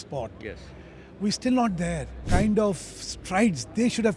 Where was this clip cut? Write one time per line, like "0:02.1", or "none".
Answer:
0:02.2